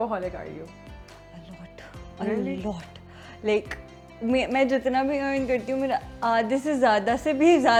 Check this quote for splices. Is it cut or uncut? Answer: uncut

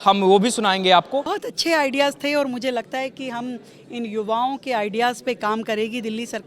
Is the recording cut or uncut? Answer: cut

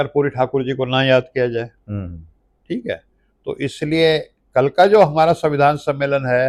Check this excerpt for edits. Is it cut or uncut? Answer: uncut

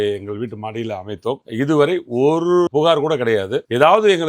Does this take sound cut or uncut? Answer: cut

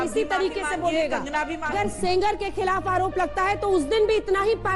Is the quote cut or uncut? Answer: cut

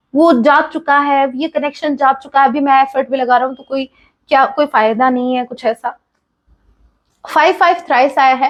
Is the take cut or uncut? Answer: uncut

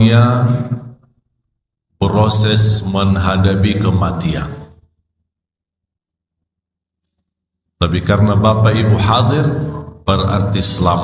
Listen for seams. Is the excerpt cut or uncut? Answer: uncut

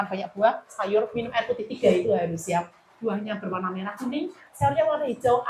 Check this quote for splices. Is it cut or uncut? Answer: uncut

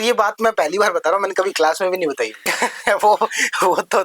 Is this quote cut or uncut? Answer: cut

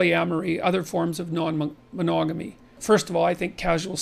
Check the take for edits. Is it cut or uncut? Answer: cut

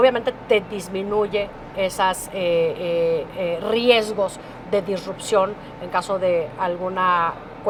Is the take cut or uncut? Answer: uncut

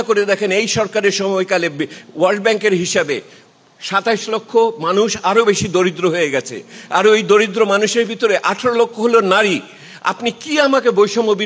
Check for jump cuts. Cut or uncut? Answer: uncut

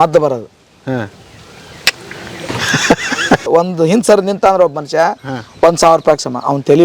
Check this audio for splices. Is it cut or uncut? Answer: cut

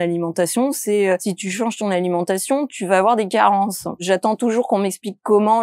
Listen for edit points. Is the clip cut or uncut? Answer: cut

